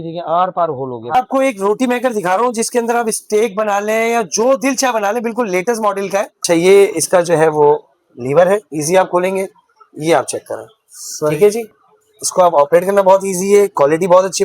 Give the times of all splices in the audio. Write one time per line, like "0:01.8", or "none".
0:01.1
0:06.4
0:11.7